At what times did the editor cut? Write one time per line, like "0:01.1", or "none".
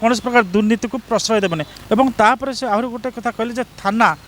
0:01.7